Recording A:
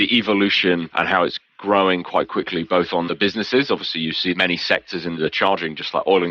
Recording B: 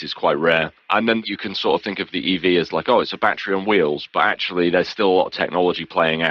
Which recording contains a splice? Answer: A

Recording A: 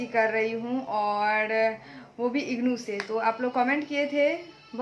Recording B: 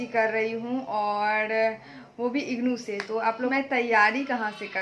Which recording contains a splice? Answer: B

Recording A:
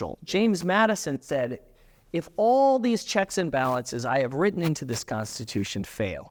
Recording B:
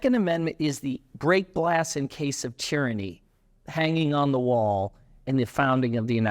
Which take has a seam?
B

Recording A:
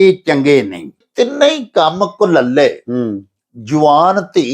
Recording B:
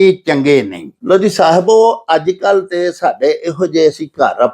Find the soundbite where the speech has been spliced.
A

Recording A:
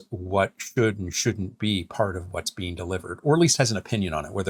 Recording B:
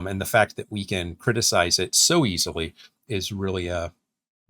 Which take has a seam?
B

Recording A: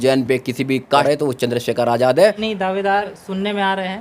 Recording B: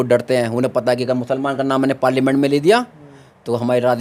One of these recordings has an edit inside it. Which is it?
A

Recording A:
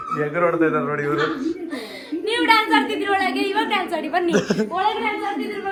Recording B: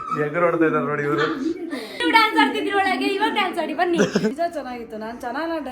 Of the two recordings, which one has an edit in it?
B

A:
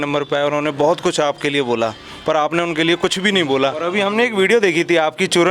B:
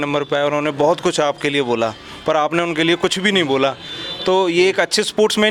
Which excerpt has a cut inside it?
A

